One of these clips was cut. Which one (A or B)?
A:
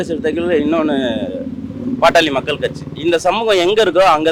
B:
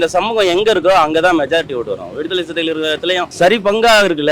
B